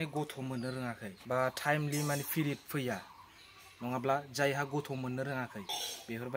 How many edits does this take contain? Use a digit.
1